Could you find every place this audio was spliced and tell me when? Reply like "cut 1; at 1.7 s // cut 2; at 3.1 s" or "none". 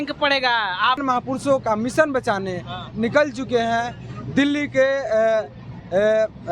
cut 1; at 1.0 s